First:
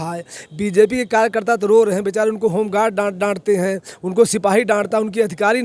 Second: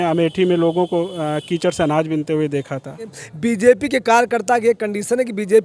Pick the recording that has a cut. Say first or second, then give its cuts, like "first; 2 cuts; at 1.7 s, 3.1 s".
second; 1 cut; at 3.2 s